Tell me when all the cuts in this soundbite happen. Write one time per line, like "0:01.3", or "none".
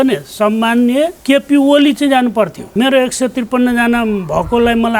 0:01.2
0:02.6